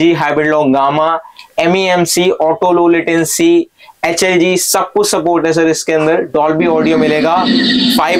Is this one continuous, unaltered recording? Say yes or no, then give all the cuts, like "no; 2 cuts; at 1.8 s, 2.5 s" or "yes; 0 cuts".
yes; 0 cuts